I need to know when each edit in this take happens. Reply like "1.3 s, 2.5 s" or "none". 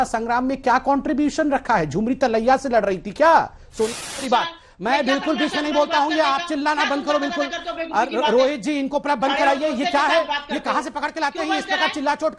3.7 s, 7.9 s